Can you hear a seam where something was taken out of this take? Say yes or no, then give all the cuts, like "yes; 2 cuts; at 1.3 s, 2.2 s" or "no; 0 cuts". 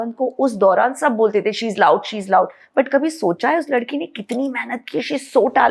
no; 0 cuts